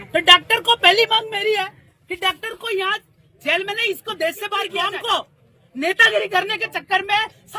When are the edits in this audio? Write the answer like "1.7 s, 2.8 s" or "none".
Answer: 4.7 s